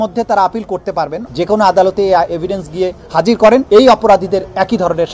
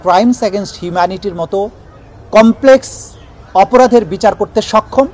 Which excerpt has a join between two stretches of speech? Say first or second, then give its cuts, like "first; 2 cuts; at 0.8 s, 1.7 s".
first; 2 cuts; at 1.2 s, 3.6 s